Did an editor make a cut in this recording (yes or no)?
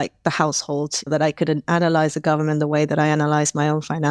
no